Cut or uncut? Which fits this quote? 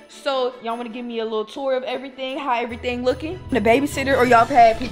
cut